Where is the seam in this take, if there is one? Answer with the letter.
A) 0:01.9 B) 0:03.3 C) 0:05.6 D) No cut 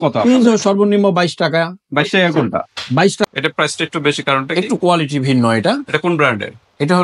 B